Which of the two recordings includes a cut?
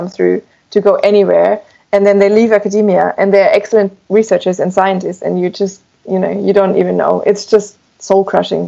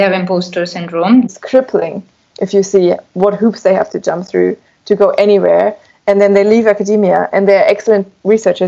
second; 1 cut; at 1.3 s

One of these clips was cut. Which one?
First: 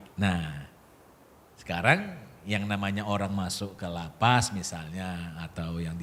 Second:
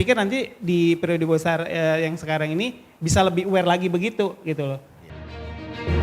second; 1 cut; at 5.1 s

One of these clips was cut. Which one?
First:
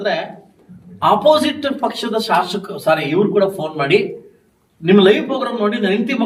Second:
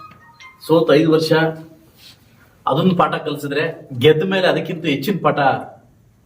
second; 1 cut; at 3.8 s

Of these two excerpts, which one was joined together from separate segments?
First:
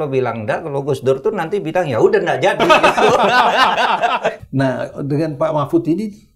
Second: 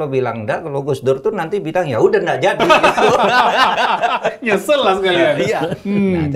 first; 1 cut; at 4.4 s

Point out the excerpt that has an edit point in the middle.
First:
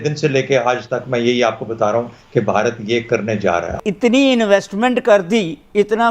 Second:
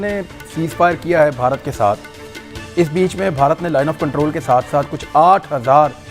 first; 1 cut; at 3.7 s

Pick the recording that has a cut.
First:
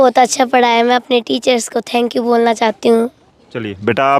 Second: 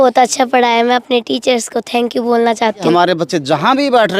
second; 1 cut; at 2.9 s

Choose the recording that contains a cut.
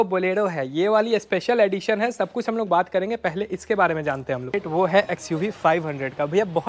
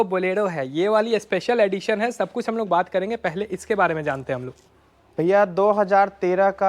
first; 1 cut; at 4.6 s

